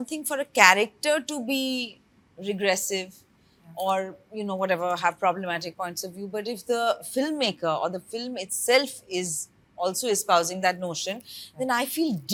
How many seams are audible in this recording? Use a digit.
0